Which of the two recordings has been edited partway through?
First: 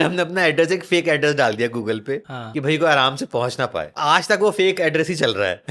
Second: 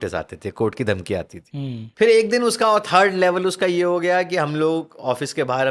first; 1 cut; at 3.9 s

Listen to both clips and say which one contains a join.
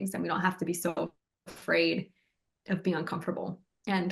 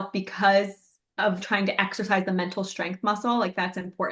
second; 1 cut; at 1.4 s

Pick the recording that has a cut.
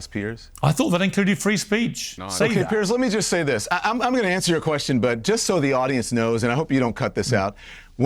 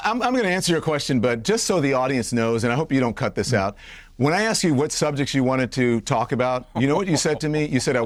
first; 1 cut; at 2.2 s

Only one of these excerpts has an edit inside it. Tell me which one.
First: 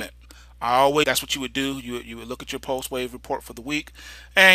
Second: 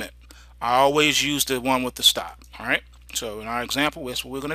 second; 1 cut; at 1.0 s

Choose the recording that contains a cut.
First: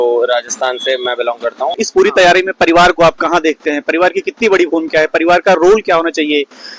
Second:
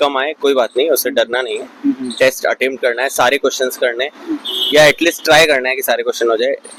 first; 1 cut; at 1.8 s

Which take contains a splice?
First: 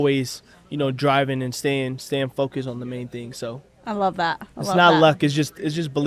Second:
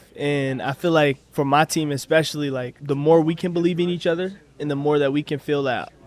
second; 2 cuts; at 1.2 s, 2.7 s

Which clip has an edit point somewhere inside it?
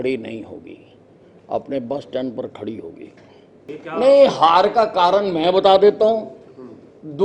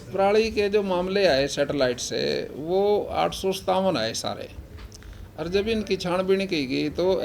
first; 1 cut; at 3.7 s

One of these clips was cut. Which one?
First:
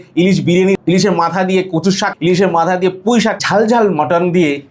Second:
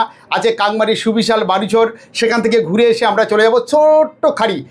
first; 3 cuts; at 0.8 s, 2.1 s, 3.4 s

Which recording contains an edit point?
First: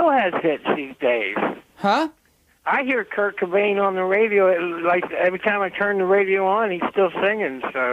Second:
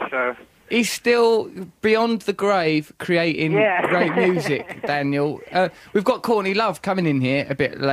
second; 1 cut; at 2.4 s

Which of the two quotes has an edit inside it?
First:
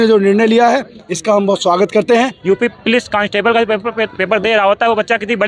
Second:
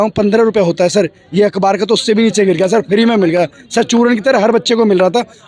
first; 1 cut; at 2.4 s

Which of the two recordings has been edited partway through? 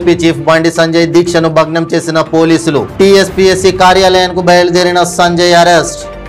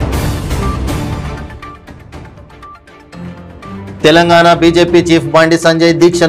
second; 2 cuts; at 1.2 s, 3.9 s

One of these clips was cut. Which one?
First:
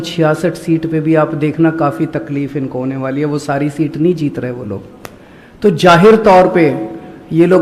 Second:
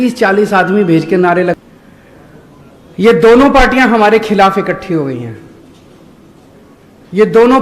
second; 1 cut; at 1.6 s

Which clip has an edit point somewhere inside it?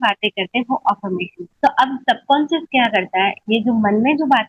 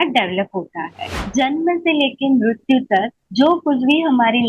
second; 1 cut; at 1.0 s

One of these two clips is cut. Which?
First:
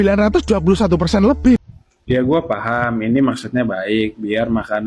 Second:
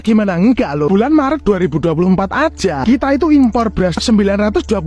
first; 1 cut; at 1.6 s

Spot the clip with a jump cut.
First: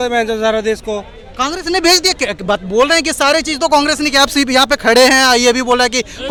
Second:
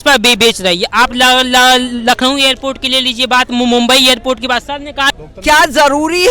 second; 1 cut; at 5.1 s

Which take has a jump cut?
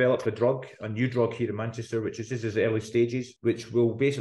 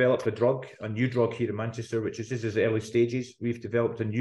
first; 1 cut; at 3.3 s

